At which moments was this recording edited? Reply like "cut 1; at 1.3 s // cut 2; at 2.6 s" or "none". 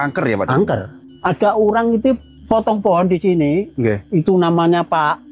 none

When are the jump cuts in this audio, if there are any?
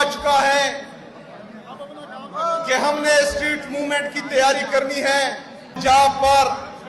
cut 1; at 5.8 s

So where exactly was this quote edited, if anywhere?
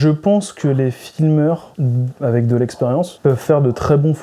cut 1; at 1.7 s // cut 2; at 3.1 s

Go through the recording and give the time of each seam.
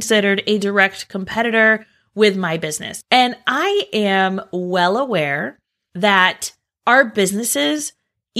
cut 1; at 2.9 s

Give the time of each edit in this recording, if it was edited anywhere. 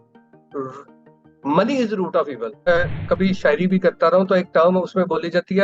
cut 1; at 2.7 s

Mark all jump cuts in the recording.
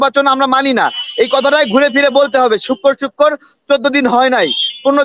none

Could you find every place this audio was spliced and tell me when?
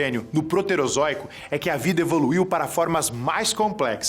cut 1; at 1.8 s

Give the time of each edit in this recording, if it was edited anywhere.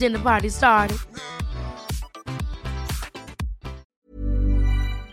cut 1; at 3.9 s

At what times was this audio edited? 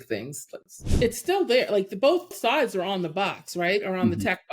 cut 1; at 0.9 s // cut 2; at 2.4 s

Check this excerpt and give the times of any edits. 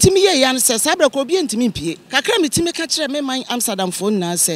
cut 1; at 2.0 s

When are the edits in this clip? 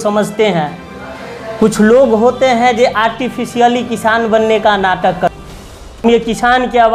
cut 1; at 6.0 s

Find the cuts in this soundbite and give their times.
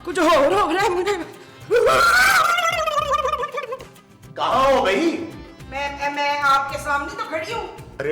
cut 1; at 3.9 s

